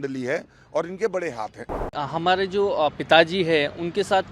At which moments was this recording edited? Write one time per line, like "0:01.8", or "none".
0:01.9